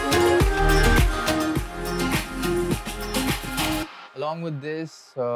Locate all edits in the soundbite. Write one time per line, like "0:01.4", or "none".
0:04.0